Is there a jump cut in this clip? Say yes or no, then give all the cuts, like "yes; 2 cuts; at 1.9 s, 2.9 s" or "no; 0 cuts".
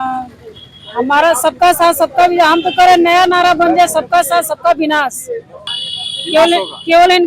yes; 1 cut; at 5.6 s